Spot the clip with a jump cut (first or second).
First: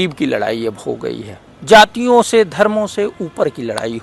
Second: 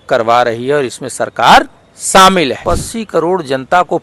second